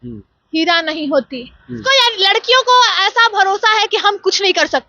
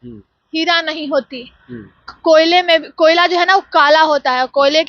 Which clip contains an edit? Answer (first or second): first